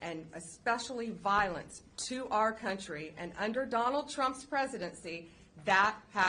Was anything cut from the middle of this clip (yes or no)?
no